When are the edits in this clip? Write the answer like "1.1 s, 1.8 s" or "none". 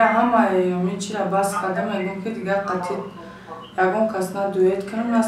none